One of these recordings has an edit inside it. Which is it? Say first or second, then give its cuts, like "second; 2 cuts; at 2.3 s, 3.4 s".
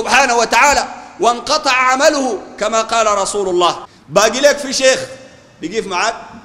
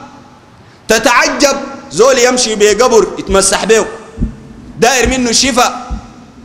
first; 1 cut; at 3.9 s